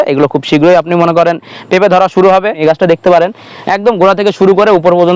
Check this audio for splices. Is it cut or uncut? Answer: cut